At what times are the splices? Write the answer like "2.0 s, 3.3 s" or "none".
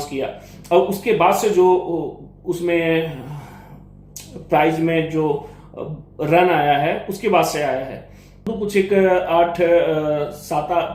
8.5 s